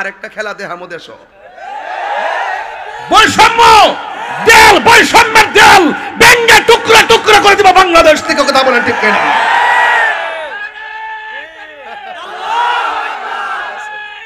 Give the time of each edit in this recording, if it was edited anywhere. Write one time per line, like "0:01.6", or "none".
none